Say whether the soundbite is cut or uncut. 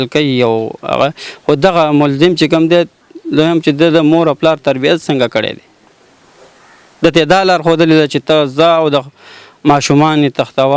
uncut